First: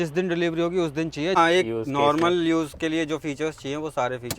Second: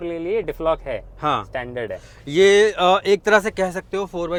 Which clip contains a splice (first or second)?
first